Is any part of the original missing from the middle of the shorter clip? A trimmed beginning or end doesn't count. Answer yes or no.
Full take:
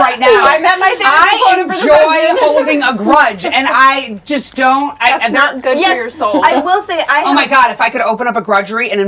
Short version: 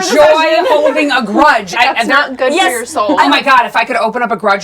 yes